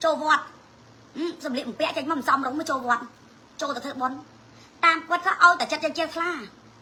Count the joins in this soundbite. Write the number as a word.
zero